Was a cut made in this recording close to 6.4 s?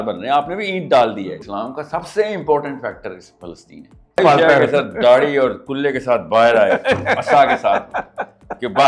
no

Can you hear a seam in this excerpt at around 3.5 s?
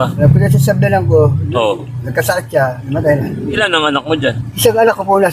yes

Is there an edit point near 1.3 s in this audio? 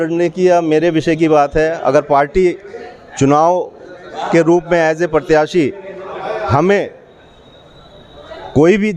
no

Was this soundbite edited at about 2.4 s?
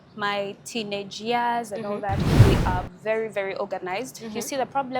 yes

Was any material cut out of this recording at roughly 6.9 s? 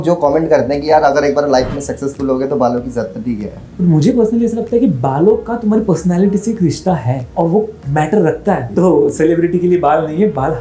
no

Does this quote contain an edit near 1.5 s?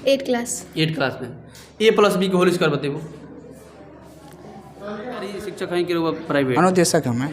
no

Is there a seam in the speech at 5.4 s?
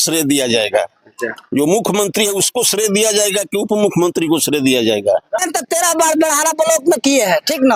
yes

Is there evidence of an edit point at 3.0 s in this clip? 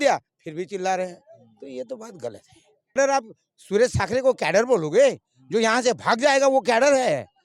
yes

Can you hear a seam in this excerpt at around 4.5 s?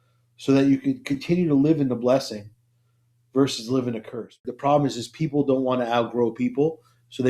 yes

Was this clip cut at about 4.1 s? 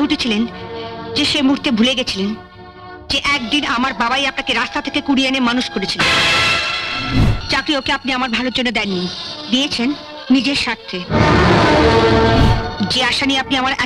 no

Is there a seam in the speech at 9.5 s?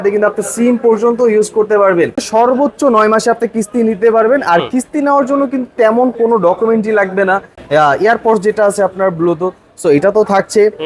no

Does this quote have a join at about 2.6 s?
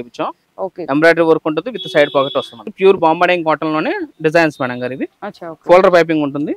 yes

